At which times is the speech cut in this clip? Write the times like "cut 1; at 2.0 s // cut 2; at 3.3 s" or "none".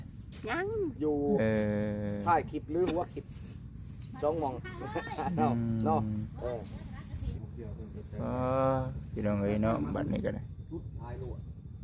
cut 1; at 7.3 s